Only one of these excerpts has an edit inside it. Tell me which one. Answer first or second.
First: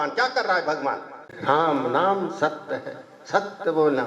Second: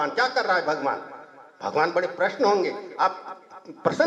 first